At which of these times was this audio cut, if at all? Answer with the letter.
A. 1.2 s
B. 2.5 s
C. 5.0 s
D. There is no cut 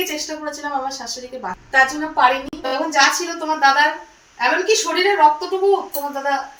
B